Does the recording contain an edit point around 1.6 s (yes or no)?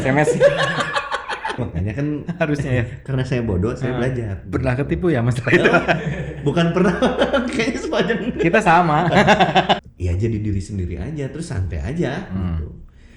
yes